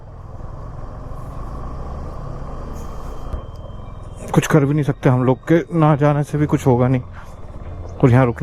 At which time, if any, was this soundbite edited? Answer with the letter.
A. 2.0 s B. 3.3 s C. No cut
B